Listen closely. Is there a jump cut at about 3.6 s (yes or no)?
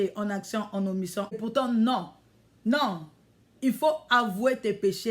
no